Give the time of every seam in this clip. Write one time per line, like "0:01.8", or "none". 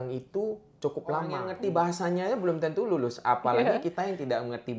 0:01.5